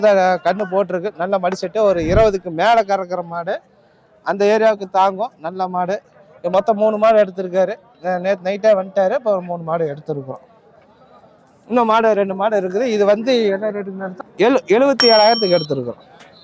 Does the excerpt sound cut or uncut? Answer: uncut